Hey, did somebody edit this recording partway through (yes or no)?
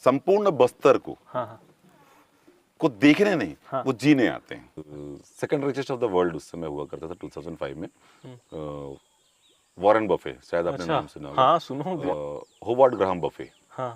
yes